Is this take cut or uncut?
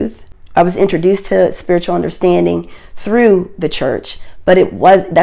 uncut